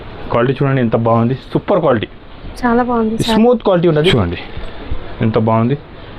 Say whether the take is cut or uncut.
cut